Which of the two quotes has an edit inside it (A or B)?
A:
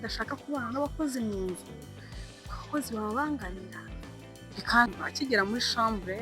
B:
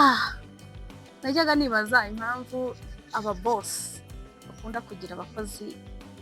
A